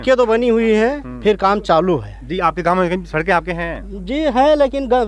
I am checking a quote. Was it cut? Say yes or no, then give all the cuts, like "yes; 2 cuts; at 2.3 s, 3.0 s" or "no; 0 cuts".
no; 0 cuts